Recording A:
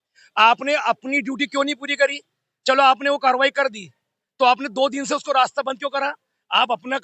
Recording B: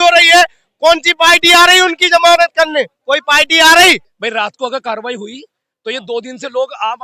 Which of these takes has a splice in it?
B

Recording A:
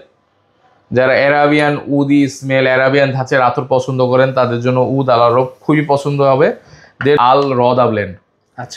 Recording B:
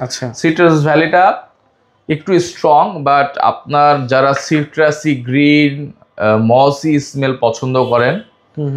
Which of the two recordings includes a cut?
A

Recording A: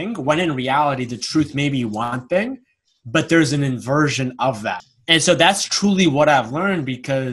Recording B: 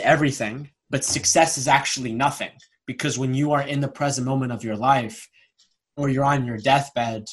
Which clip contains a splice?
A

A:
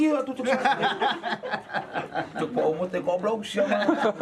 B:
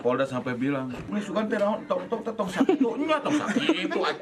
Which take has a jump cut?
B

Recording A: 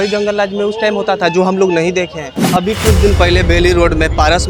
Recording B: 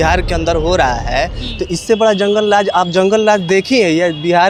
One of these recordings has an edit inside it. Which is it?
A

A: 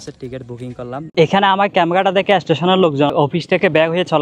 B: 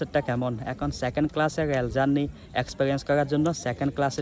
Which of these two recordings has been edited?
A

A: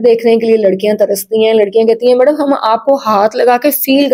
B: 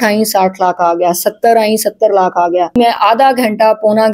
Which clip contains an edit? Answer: B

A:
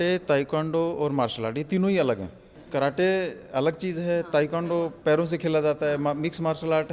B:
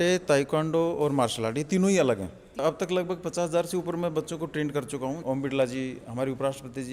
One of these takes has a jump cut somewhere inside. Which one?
B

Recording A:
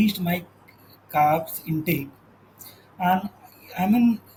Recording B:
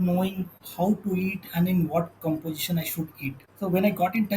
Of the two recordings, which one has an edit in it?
B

